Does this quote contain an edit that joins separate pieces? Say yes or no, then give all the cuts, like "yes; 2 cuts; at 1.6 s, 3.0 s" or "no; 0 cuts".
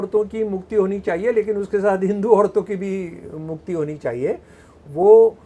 no; 0 cuts